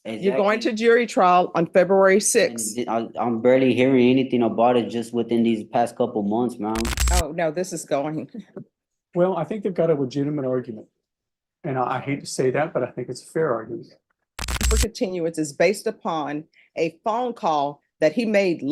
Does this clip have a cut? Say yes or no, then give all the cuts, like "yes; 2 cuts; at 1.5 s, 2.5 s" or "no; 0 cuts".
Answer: yes; 2 cuts; at 7.0 s, 14.7 s